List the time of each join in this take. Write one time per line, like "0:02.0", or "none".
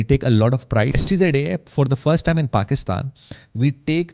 0:00.9